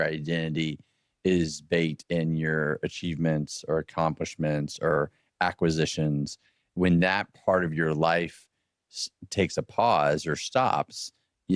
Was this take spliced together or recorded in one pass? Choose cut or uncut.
uncut